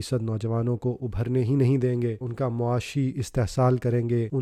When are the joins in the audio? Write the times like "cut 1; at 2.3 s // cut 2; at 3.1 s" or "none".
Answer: cut 1; at 2.2 s